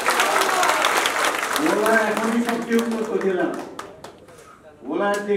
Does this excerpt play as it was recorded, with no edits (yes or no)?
yes